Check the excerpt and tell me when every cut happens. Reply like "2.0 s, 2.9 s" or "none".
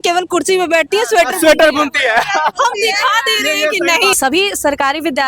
4.1 s